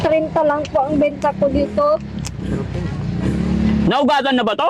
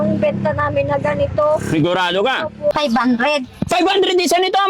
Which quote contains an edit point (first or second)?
second